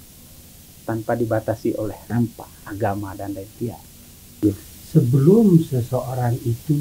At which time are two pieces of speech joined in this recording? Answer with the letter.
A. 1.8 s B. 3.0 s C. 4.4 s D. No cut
C